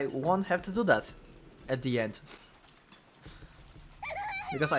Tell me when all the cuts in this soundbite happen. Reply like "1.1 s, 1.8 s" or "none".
none